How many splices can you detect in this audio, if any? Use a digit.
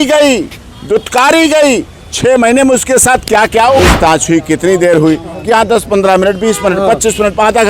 1